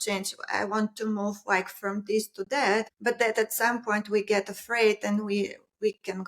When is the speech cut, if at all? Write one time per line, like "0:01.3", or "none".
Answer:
0:02.9